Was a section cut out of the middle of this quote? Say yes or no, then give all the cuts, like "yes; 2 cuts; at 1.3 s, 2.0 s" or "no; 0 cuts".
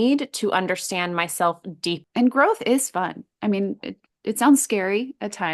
yes; 1 cut; at 2.0 s